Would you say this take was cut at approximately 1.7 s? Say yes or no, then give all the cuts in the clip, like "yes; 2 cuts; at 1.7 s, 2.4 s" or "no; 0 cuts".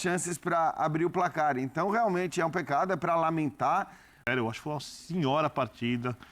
no; 1 cut; at 4.2 s